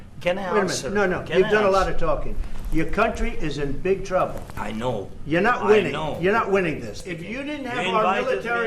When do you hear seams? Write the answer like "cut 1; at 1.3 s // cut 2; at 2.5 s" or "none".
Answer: cut 1; at 7.1 s